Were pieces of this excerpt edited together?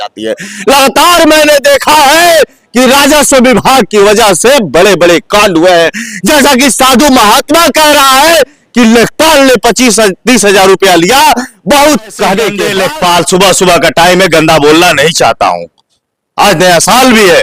yes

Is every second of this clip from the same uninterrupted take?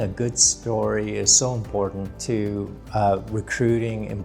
no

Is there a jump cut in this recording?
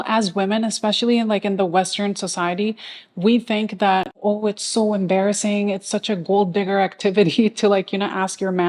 no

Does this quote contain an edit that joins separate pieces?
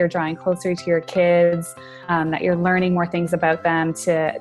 yes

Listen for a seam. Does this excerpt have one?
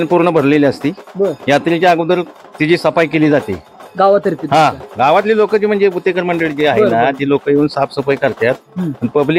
no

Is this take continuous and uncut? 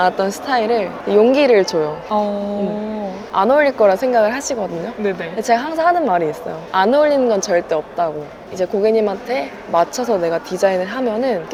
yes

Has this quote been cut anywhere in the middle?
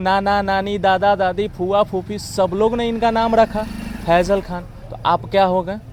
no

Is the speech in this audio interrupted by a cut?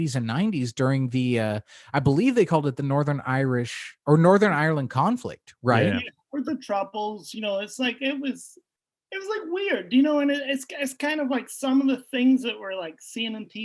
no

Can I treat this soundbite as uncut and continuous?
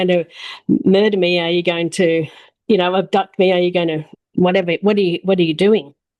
no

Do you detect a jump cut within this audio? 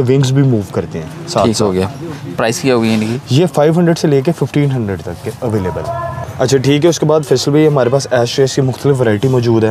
no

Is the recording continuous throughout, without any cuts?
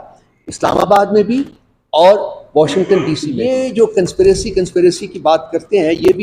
no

